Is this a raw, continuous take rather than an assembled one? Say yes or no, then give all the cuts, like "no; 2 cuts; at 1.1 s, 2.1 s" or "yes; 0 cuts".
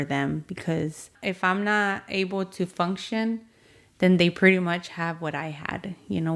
no; 1 cut; at 1.1 s